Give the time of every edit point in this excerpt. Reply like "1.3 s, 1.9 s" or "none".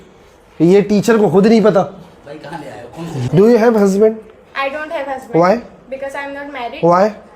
3.2 s